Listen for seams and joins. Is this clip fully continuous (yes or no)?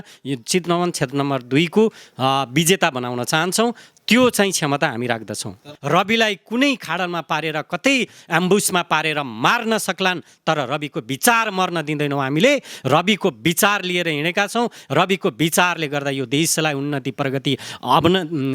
no